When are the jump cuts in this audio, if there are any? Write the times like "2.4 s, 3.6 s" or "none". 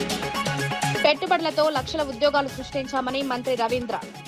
none